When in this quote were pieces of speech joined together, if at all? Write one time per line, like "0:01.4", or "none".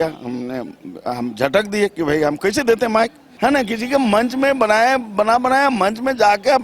0:03.2